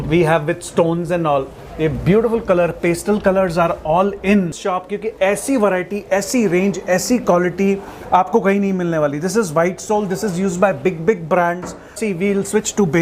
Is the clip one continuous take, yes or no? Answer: no